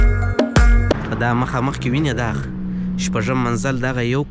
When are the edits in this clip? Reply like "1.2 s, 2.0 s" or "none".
0.9 s

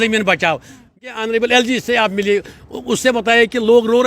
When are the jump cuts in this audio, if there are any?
1.0 s

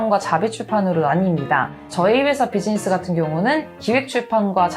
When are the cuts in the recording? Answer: 1.8 s

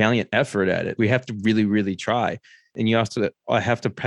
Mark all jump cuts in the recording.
0.9 s, 2.6 s

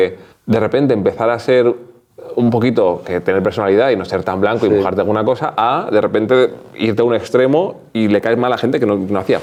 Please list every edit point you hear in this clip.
none

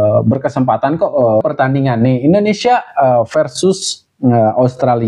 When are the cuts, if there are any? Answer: 1.4 s

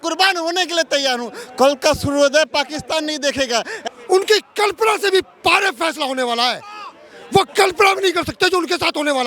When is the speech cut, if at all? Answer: 3.7 s

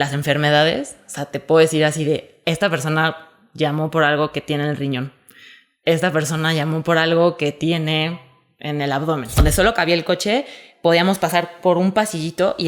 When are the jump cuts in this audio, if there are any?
9.4 s

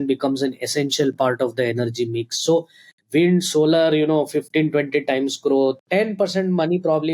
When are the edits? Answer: 5.8 s

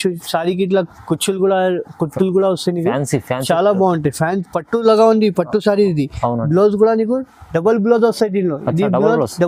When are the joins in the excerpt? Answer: none

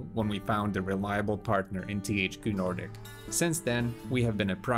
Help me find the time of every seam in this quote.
1.8 s, 3.0 s

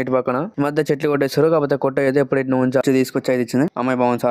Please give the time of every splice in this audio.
2.8 s

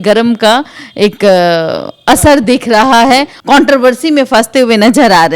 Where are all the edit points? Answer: 3.3 s

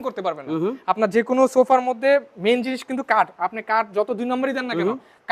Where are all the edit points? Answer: none

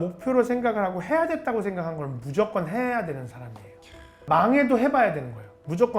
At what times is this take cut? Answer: 4.2 s

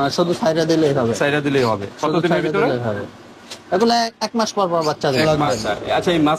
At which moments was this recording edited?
5.4 s

